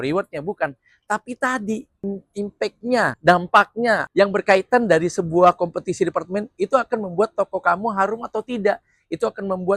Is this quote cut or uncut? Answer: cut